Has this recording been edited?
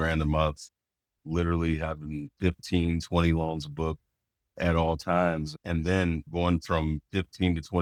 no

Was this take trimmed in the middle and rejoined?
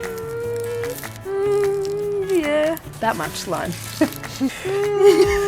yes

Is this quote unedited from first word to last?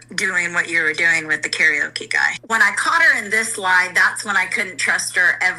no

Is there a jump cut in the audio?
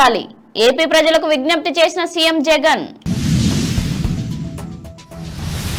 no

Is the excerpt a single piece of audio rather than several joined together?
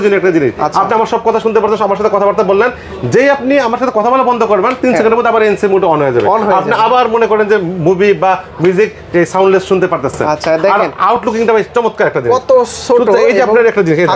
yes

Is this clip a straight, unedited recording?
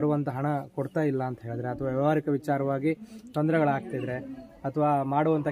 yes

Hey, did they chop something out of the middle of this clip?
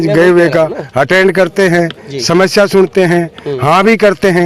no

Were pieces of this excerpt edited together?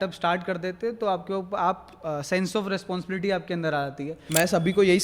yes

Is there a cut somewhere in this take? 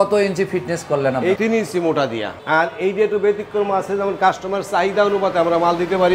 no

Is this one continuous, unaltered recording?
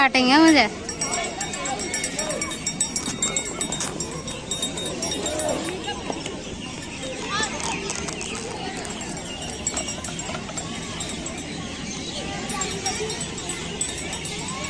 yes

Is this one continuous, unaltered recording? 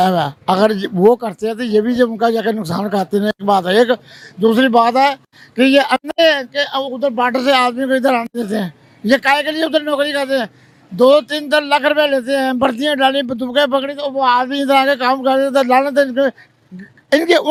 yes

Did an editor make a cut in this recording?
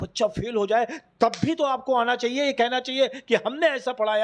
no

